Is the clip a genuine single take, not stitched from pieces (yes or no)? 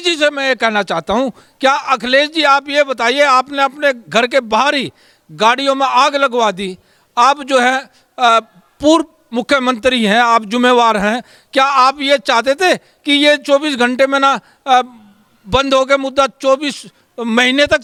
yes